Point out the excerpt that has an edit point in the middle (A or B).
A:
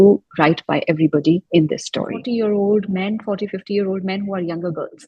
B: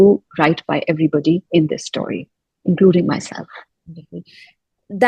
A